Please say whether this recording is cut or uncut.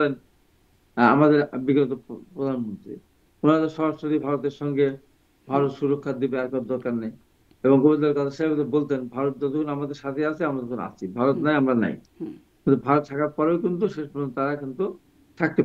uncut